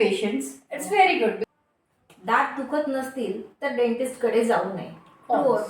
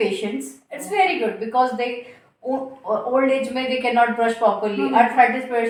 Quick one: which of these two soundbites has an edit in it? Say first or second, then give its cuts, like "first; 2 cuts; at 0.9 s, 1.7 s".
first; 1 cut; at 1.4 s